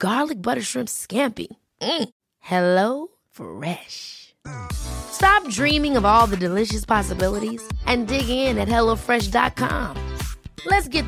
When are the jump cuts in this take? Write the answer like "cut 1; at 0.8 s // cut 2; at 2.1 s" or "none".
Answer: none